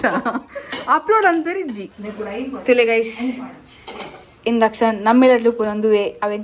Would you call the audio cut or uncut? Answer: cut